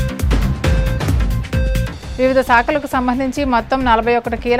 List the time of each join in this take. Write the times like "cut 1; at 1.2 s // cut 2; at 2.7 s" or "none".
none